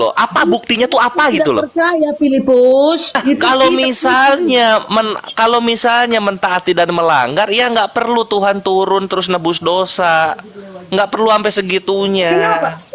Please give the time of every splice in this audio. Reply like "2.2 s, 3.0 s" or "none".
3.1 s